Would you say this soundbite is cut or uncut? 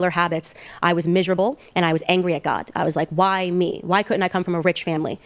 uncut